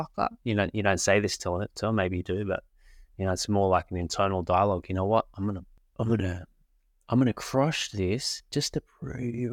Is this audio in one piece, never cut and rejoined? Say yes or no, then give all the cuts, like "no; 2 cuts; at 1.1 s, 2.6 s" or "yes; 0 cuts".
no; 1 cut; at 5.8 s